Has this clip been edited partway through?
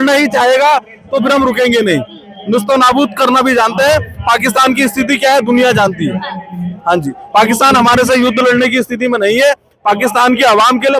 no; 0 cuts

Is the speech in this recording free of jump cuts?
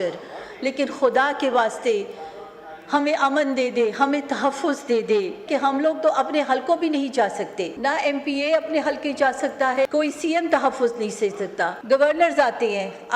no; 4 cuts; at 5.4 s, 7.7 s, 9.9 s, 11.8 s

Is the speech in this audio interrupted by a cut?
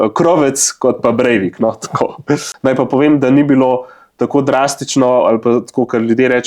yes; 1 cut; at 2.5 s

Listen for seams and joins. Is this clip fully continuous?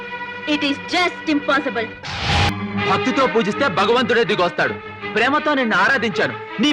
no; 1 cut; at 2.5 s

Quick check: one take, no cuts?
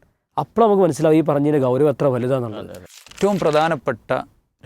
no; 1 cut; at 2.9 s

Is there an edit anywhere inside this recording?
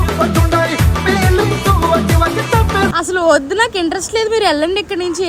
yes; 1 cut; at 2.9 s

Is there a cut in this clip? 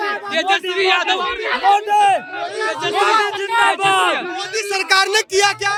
no; 0 cuts

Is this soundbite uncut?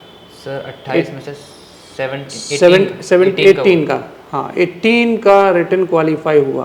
yes; 0 cuts

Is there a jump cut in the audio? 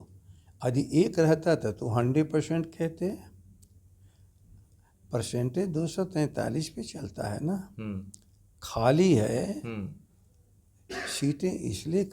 no; 0 cuts

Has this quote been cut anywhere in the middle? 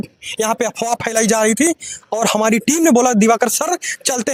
no; 0 cuts

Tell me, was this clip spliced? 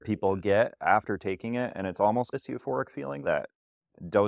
yes; 1 cut; at 3.2 s

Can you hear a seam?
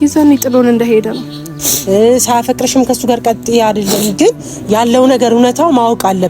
yes; 1 cut; at 1.5 s

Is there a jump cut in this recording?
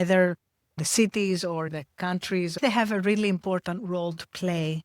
yes; 1 cut; at 2.6 s

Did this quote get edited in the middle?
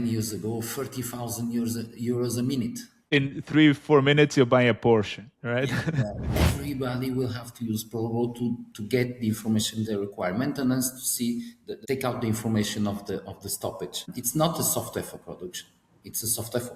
yes; 1 cut; at 6.3 s

